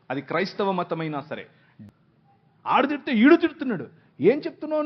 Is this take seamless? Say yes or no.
no